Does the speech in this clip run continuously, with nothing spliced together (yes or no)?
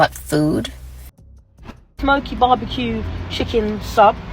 no